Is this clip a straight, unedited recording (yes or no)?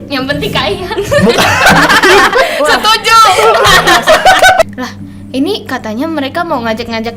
no